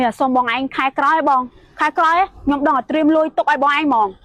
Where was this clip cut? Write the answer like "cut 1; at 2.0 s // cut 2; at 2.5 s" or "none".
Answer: none